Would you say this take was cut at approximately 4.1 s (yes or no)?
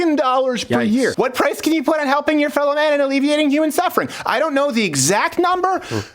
no